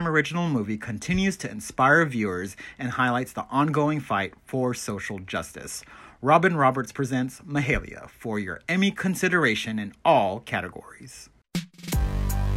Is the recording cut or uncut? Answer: cut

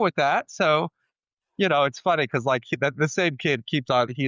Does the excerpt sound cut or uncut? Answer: uncut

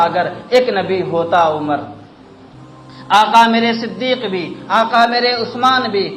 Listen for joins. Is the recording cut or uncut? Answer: uncut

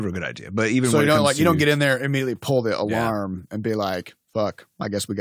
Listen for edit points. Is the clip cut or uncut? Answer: uncut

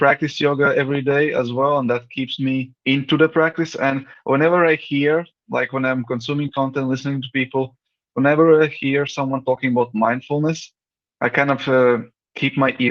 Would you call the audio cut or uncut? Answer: uncut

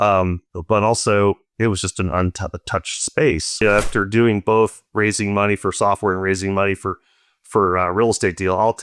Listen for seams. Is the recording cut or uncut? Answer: cut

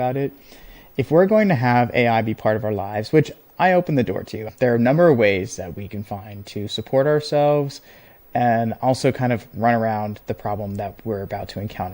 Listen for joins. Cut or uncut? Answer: cut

